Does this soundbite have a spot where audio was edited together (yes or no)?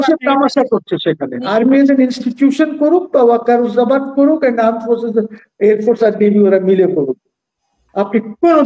yes